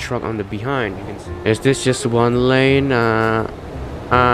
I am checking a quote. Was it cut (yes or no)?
yes